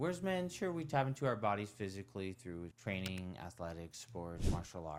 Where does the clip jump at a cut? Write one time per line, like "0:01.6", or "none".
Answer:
none